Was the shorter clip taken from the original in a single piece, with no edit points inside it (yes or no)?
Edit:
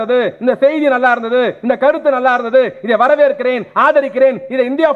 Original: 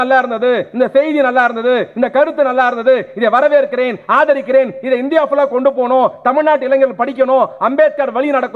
yes